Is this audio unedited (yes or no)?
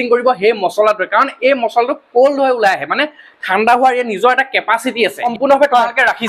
no